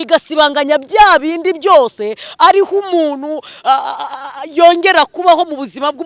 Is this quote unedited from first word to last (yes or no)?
yes